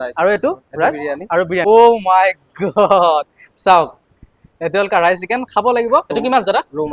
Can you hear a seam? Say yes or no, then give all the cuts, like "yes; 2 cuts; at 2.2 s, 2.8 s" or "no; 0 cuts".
yes; 2 cuts; at 1.6 s, 6.1 s